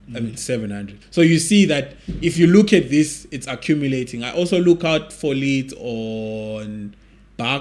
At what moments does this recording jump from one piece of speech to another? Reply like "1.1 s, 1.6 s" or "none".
1.0 s

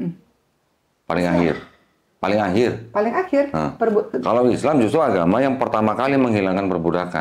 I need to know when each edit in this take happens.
none

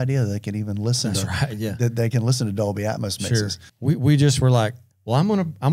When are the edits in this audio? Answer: 3.6 s

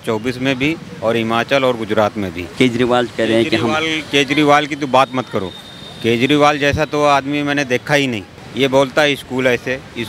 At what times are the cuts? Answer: 2.5 s, 8.4 s

